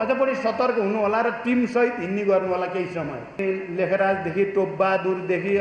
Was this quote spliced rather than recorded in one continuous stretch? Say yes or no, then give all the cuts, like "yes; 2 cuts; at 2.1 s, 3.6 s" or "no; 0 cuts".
yes; 1 cut; at 3.4 s